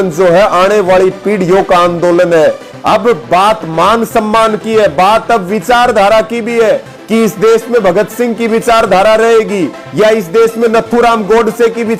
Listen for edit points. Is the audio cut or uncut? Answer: uncut